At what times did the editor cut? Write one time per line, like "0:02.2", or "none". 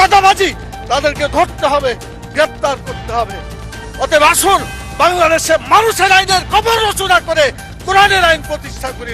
0:03.8